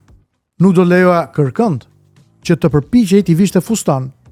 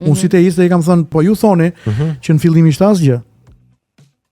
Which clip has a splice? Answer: second; 1 cut; at 1.1 s

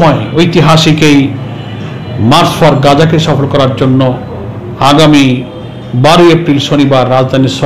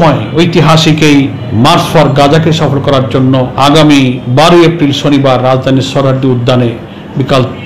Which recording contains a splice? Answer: second; 3 cuts; at 1.4 s, 3.5 s, 4.2 s

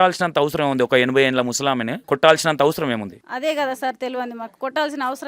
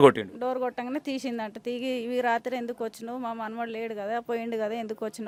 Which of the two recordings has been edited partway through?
first; 2 cuts; at 1.9 s, 3.2 s

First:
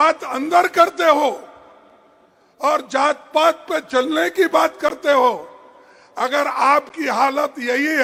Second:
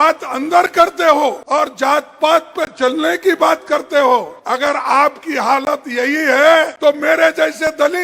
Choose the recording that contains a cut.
second; 3 cuts; at 1.4 s, 4.4 s, 6.7 s

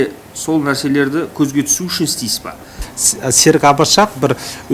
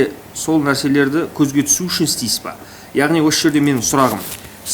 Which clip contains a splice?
first; 1 cut; at 2.8 s

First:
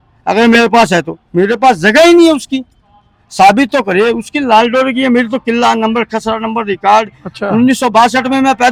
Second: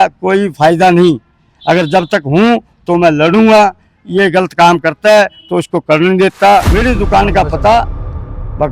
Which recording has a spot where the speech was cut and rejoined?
second; 1 cut; at 6.7 s

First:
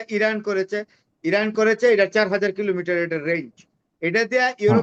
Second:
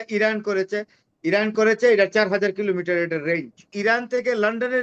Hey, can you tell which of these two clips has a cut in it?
second; 1 cut; at 3.7 s

